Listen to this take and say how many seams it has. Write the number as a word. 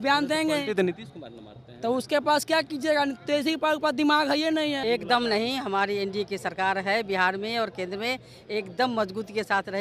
one